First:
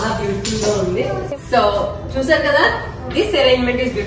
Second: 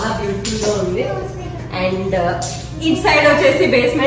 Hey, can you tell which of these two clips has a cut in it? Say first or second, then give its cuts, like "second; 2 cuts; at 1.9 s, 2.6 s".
first; 1 cut; at 1.4 s